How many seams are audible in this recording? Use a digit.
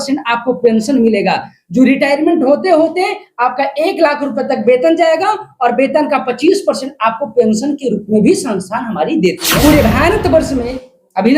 1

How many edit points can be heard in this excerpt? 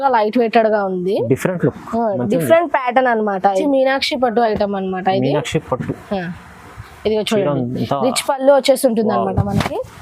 1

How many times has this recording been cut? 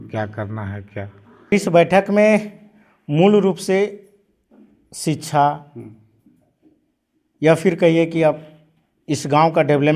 1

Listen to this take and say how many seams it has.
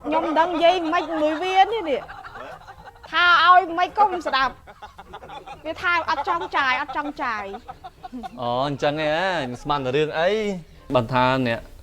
1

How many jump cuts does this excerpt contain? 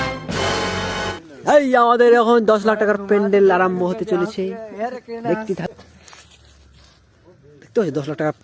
1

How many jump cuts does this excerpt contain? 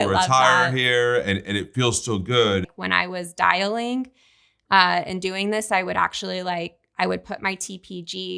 1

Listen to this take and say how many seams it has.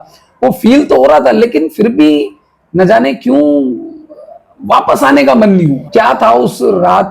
0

